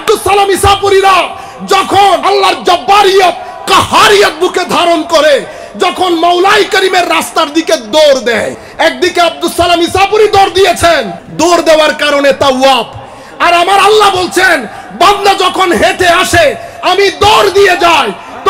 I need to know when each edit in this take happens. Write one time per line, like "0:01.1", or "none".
0:02.2
0:08.6
0:11.2

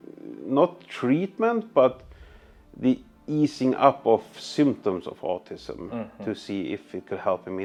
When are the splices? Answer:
none

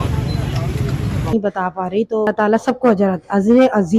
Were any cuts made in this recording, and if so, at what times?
0:01.3

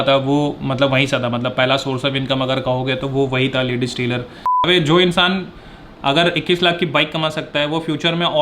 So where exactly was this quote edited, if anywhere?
0:04.3

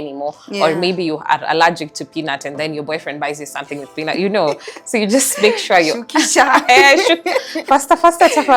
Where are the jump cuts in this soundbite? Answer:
none

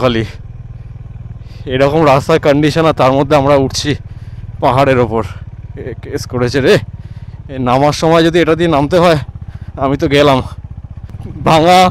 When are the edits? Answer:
0:10.9

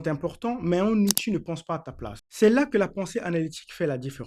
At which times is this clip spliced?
0:02.2

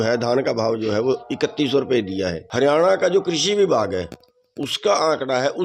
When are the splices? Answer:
0:02.4

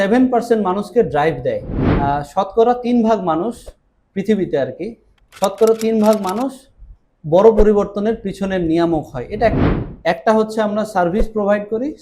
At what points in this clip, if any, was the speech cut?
0:01.9
0:09.6

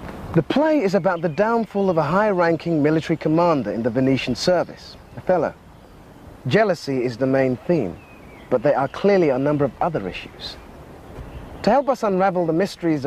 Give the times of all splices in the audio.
0:02.2

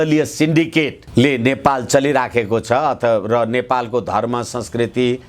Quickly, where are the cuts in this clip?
0:01.0

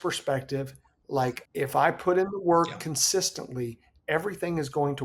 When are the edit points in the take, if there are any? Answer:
0:01.4

